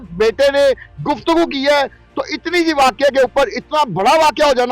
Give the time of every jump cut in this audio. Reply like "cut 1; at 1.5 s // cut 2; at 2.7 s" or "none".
cut 1; at 2.0 s

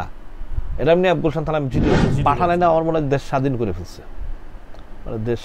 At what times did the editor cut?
cut 1; at 2.1 s

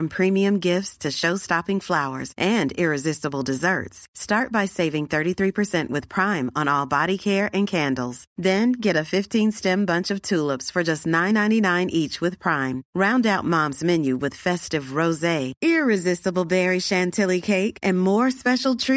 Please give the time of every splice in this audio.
none

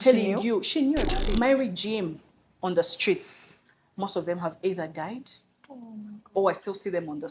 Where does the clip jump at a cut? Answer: cut 1; at 1.2 s

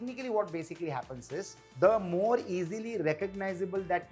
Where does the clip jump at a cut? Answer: cut 1; at 1.6 s

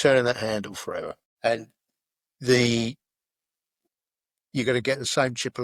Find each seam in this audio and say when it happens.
cut 1; at 1.3 s

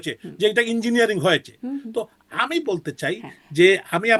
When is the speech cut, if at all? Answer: none

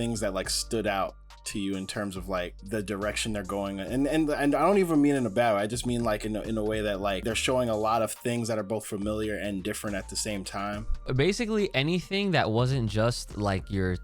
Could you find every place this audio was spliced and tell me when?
cut 1; at 2.6 s // cut 2; at 7.2 s // cut 3; at 11.1 s

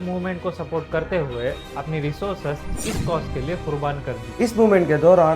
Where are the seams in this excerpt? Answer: cut 1; at 4.3 s

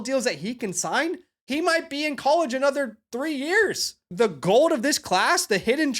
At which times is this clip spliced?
cut 1; at 1.3 s // cut 2; at 4.1 s

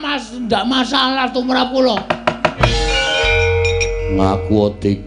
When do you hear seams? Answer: cut 1; at 2.7 s

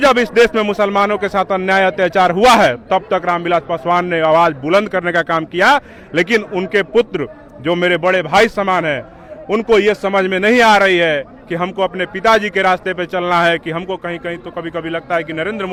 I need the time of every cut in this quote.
none

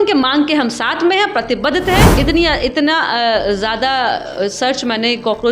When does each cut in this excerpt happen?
cut 1; at 2.1 s

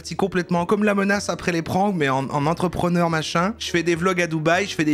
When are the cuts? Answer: none

